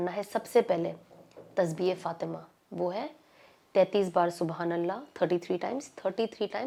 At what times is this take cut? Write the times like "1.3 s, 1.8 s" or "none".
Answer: none